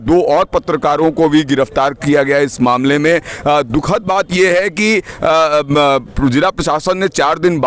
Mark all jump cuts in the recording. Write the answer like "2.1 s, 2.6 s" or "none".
none